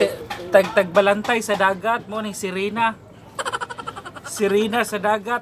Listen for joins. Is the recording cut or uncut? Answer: cut